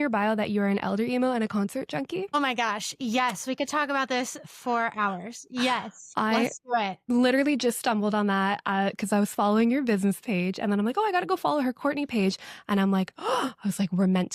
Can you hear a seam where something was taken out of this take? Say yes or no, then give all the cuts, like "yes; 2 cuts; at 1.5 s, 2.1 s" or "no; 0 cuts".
no; 0 cuts